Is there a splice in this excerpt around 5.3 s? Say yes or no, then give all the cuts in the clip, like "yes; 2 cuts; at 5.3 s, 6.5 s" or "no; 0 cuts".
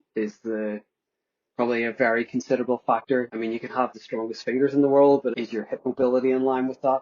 yes; 2 cuts; at 3.3 s, 5.3 s